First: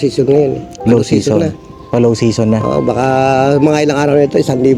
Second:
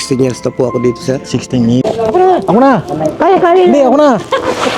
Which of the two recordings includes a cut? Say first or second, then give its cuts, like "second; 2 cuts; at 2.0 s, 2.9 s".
second; 1 cut; at 1.8 s